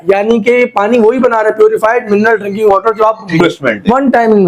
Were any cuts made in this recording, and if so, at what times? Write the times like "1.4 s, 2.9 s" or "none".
3.4 s